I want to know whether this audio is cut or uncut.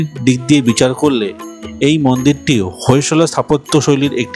uncut